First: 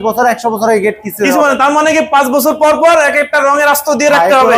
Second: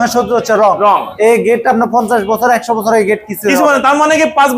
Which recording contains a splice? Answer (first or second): second